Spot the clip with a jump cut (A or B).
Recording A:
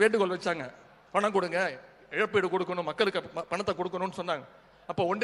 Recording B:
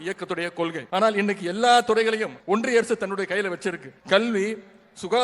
B